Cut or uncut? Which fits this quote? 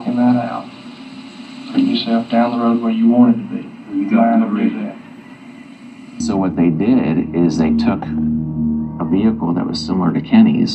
cut